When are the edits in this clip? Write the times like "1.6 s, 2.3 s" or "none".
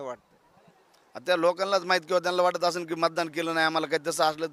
none